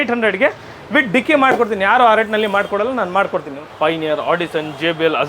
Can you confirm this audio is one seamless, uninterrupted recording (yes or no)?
no